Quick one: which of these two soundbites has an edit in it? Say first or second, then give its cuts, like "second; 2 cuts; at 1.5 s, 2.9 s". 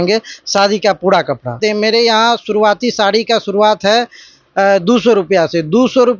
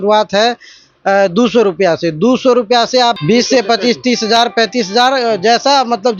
first; 1 cut; at 1.6 s